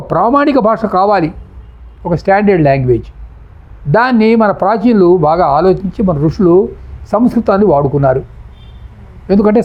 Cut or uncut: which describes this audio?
uncut